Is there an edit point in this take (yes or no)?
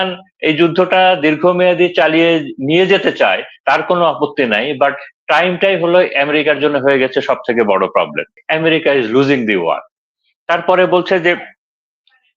yes